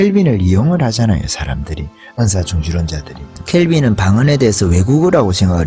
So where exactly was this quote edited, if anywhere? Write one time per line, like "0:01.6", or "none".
none